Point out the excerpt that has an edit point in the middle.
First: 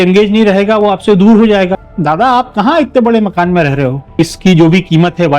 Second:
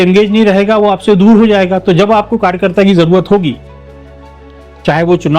first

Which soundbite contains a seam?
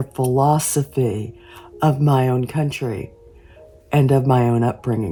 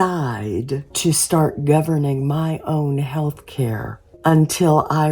second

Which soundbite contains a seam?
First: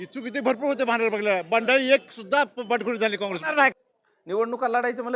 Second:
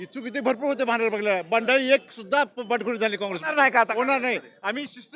first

